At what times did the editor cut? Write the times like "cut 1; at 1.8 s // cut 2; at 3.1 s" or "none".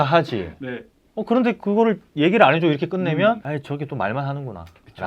cut 1; at 3.4 s